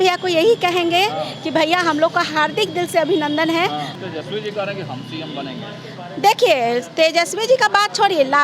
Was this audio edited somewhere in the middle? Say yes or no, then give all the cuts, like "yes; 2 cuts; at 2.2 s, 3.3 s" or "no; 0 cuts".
yes; 1 cut; at 3.9 s